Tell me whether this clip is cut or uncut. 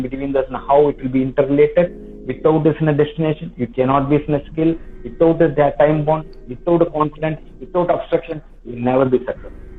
uncut